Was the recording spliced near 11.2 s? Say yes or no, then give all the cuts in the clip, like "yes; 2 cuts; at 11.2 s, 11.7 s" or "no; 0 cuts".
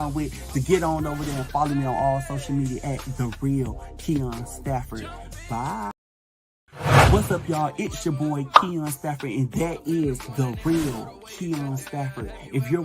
no; 1 cut; at 6.3 s